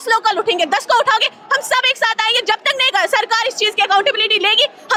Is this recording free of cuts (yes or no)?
yes